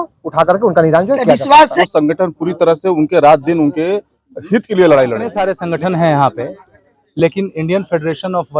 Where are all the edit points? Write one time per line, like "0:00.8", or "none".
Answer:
0:01.8
0:05.4